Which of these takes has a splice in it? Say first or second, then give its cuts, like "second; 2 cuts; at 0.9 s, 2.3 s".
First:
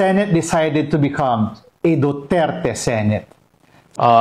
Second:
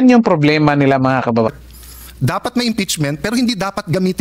second; 1 cut; at 1.5 s